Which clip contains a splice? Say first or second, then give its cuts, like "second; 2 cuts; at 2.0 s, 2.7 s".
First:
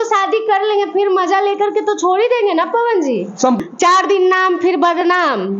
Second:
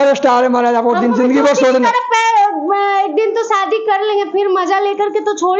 first; 1 cut; at 3.6 s